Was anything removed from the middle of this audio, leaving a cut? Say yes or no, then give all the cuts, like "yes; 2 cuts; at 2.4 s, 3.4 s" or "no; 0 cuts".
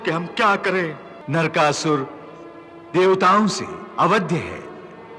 yes; 1 cut; at 1.1 s